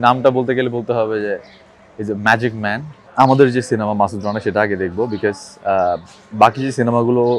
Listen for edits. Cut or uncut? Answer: cut